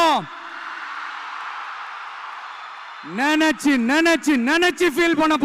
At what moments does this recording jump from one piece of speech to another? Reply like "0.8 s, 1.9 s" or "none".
none